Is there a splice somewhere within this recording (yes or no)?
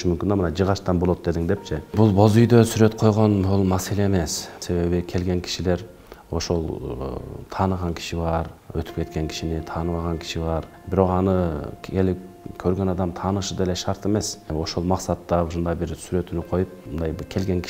yes